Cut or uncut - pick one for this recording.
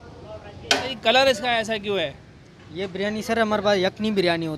cut